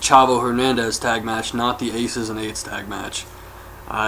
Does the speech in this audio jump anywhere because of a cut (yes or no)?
yes